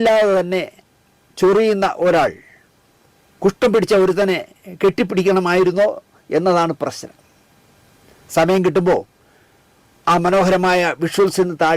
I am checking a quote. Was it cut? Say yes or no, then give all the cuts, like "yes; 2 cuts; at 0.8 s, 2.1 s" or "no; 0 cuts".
no; 0 cuts